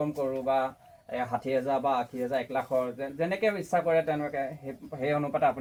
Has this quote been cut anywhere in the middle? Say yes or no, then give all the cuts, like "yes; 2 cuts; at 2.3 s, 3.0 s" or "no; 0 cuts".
no; 0 cuts